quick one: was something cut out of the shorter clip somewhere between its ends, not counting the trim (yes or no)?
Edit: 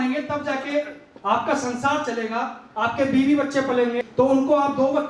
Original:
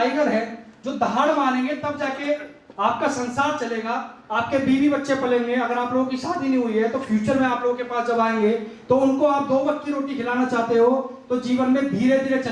yes